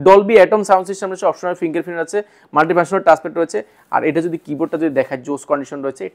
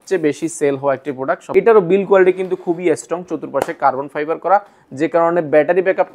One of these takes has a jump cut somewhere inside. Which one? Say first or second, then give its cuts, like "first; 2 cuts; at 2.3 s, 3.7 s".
second; 1 cut; at 1.4 s